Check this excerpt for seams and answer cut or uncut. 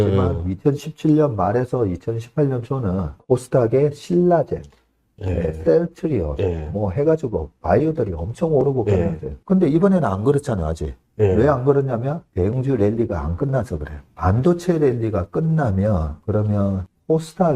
cut